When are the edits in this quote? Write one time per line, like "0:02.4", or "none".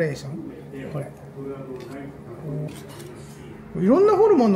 0:02.7